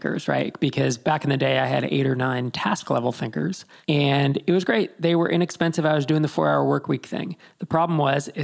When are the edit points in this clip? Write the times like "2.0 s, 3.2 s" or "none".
3.7 s